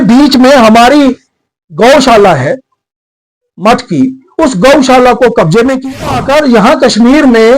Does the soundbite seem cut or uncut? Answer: cut